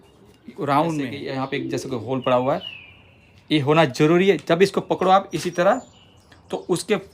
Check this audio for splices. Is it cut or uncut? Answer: cut